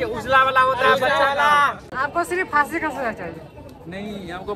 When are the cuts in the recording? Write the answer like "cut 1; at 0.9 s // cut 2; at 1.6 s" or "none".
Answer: cut 1; at 1.9 s